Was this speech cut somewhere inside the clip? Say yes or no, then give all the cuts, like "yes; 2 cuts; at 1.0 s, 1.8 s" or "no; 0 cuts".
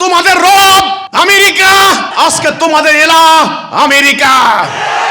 yes; 2 cuts; at 1.0 s, 2.1 s